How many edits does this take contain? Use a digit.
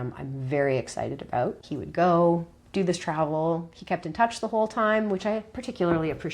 1